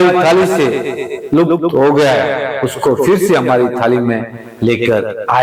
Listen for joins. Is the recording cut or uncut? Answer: uncut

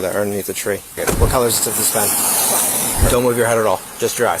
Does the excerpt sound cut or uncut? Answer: cut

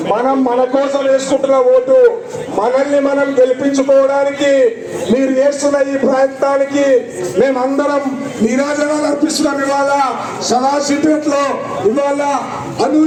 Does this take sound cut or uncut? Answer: uncut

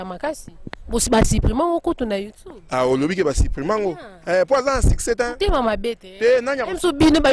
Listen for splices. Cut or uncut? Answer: uncut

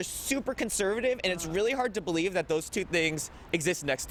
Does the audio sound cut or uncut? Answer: uncut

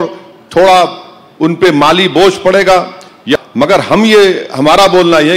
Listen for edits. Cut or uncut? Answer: cut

